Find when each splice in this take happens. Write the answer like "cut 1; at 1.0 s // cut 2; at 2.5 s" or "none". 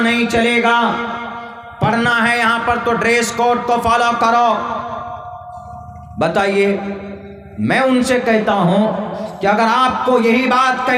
none